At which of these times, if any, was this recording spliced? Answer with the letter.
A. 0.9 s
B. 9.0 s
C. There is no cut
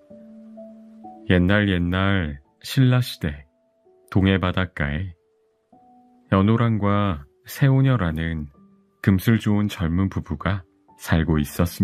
A